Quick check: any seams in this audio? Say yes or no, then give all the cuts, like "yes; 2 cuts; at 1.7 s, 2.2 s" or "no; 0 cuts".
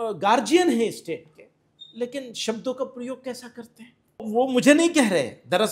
yes; 1 cut; at 4.3 s